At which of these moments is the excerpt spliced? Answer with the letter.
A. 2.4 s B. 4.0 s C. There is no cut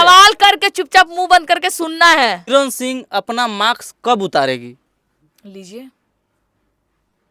A